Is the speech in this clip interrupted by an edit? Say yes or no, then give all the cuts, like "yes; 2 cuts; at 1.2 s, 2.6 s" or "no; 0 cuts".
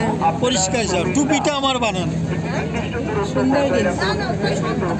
no; 0 cuts